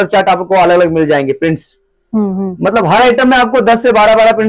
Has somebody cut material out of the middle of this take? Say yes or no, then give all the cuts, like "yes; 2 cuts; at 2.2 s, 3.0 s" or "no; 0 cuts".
no; 0 cuts